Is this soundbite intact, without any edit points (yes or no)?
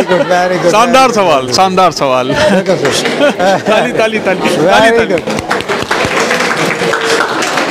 yes